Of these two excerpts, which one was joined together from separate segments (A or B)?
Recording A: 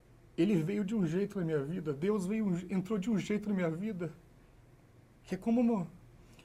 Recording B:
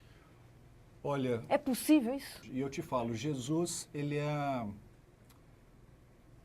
B